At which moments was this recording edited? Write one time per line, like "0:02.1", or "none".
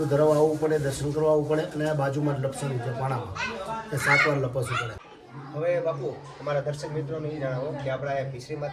0:05.0